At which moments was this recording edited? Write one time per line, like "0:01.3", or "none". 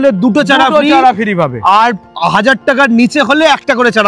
none